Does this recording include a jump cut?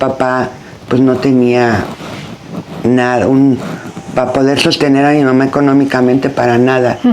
no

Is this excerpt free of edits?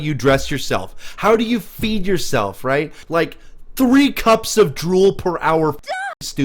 no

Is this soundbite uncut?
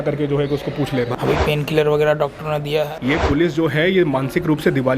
no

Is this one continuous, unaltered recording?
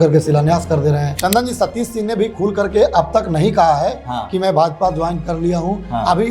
no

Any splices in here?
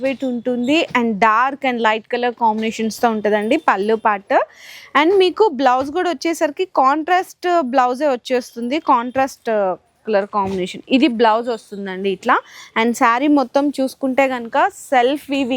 no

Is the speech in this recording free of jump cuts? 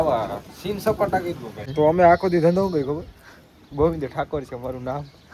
no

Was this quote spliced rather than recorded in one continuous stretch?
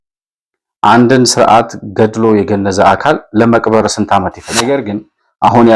yes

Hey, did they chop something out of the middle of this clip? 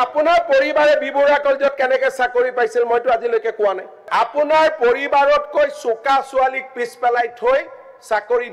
yes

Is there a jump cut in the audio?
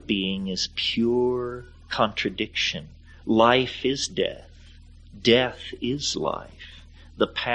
no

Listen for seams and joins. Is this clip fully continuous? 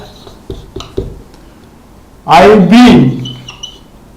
yes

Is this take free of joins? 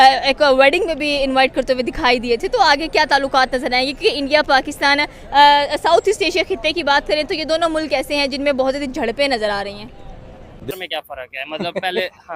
no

